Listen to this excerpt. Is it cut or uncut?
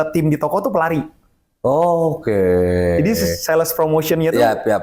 uncut